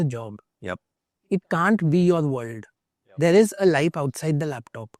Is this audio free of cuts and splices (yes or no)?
yes